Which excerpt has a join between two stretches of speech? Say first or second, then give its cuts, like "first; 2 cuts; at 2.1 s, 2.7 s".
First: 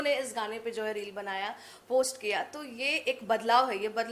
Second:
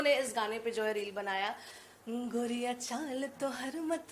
second; 1 cut; at 1.7 s